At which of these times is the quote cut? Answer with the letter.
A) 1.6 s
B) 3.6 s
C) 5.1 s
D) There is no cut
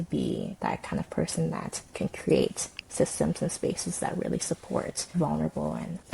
C